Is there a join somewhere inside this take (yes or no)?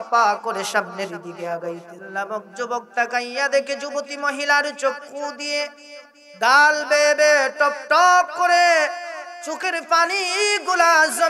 yes